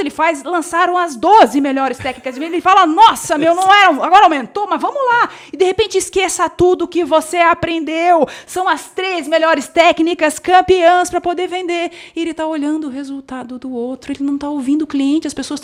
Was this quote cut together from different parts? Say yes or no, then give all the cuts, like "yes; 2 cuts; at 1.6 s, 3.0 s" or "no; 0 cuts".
no; 0 cuts